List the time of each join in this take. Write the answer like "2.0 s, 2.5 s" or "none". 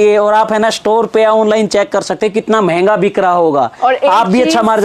none